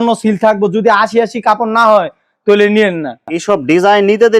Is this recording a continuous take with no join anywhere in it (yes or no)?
no